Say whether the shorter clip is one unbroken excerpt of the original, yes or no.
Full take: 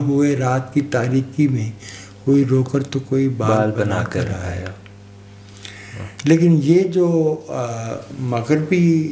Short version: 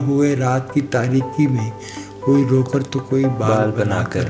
yes